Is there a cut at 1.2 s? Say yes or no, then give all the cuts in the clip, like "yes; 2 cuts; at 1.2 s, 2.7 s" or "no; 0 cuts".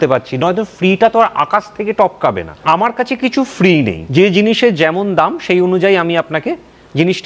no; 2 cuts; at 2.5 s, 4.0 s